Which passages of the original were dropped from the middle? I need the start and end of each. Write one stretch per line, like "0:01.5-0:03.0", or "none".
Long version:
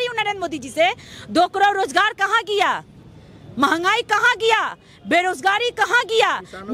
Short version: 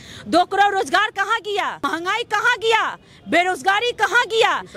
0:02.9-0:03.7

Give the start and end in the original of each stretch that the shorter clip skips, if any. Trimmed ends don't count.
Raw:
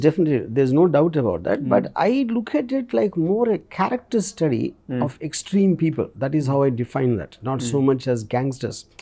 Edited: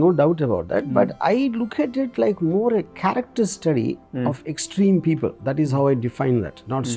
none

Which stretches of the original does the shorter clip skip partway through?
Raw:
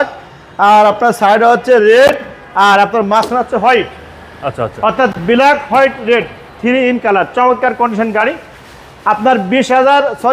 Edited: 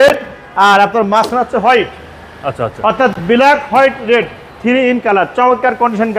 none

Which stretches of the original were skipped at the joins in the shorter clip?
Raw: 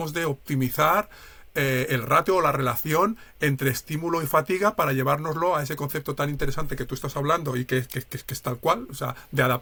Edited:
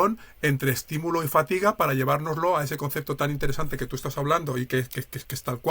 none

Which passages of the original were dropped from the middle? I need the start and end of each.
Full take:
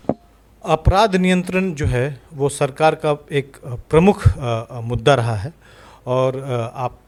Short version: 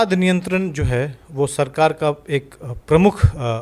none

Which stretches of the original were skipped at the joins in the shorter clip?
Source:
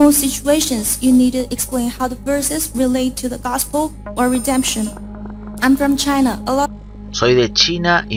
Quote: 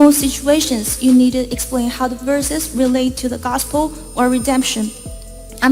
none

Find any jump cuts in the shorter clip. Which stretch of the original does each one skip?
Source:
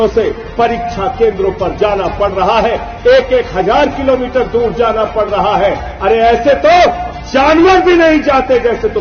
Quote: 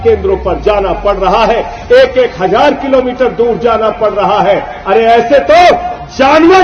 none

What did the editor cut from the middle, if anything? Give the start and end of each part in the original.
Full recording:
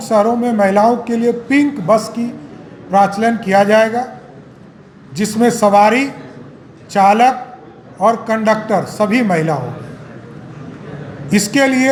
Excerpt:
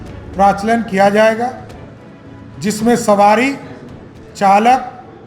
none

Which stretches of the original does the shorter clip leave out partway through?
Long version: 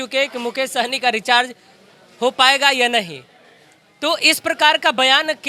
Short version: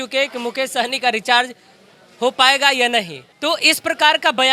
0:03.2-0:03.8

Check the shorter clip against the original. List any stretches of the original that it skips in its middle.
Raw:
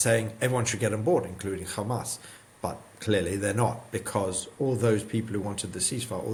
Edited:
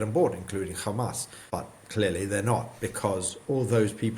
0:02.2-0:02.4

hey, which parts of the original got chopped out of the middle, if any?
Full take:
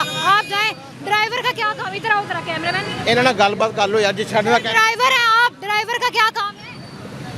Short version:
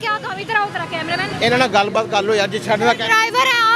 0:02.9-0:03.0

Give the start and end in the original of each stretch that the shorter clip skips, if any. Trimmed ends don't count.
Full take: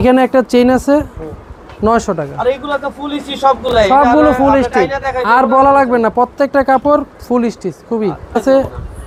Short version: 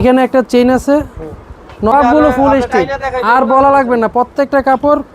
0:01.9-0:03.9

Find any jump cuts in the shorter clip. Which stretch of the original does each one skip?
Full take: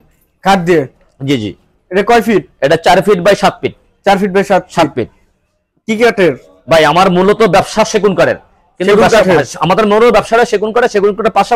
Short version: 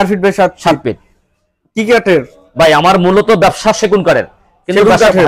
none

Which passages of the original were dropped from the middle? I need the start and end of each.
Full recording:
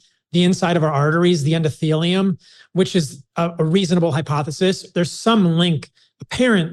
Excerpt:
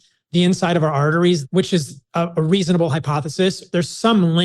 0:01.4-0:02.6

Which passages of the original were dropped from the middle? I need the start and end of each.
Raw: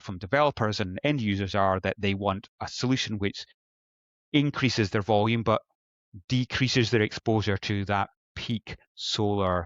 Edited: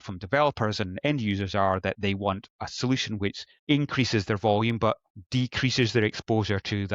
0:03.5-0:04.1
0:05.8-0:06.1

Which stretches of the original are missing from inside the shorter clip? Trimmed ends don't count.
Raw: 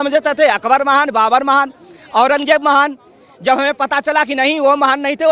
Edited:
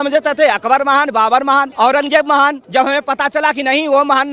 0:01.7-0:02.1
0:03.0-0:03.3

